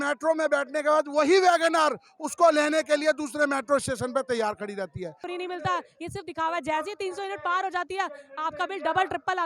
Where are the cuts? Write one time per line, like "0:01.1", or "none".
0:05.2

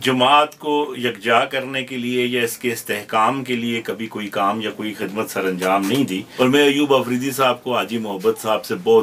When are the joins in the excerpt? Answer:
0:06.2

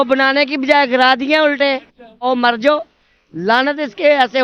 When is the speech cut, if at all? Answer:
0:02.2

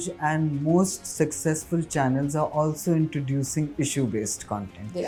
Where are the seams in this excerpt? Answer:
none

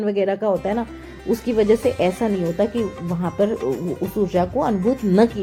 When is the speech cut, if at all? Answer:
none

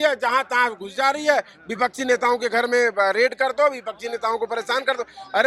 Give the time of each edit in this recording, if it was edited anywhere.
none

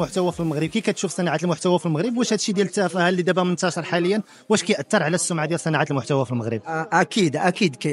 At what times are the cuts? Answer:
none

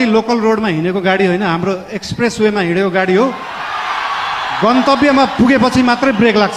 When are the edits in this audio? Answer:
none

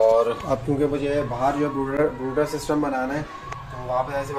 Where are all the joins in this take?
none

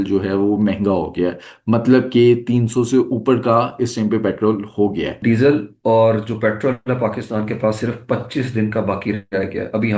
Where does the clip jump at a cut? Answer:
0:05.2

